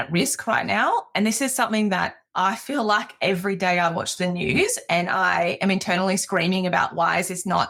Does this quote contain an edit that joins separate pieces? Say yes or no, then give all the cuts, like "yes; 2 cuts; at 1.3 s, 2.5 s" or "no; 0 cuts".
no; 0 cuts